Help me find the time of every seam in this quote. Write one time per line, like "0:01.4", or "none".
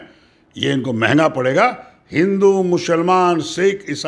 none

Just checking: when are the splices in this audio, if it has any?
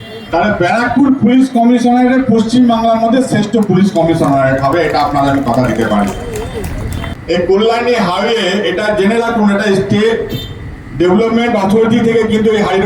none

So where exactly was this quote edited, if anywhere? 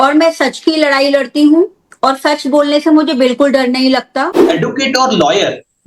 0:04.4

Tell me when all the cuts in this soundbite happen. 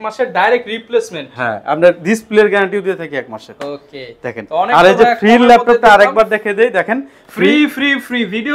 none

